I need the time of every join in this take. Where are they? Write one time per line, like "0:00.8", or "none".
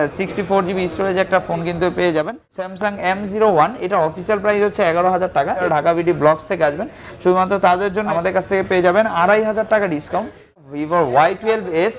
0:02.7
0:05.6
0:08.1
0:10.6